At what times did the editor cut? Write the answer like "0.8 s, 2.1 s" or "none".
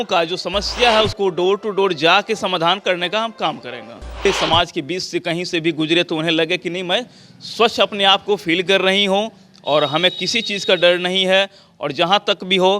4.3 s